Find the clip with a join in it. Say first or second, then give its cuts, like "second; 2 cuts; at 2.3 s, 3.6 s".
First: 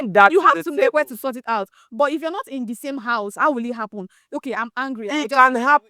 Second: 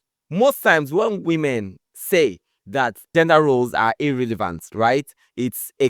second; 1 cut; at 3.1 s